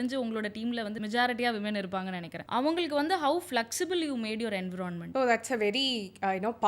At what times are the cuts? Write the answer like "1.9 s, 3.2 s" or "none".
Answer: 0.9 s, 2.3 s, 5.0 s